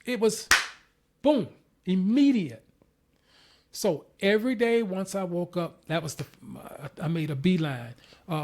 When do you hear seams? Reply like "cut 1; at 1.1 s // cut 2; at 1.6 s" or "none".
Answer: cut 1; at 3.7 s